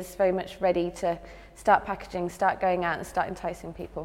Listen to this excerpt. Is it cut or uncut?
uncut